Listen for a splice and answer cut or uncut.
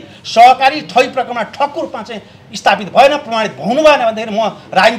uncut